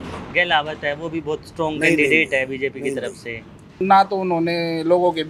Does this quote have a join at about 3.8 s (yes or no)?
yes